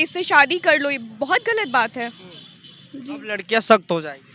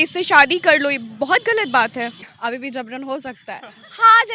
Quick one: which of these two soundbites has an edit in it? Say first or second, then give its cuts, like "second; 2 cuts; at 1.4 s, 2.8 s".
second; 1 cut; at 2.3 s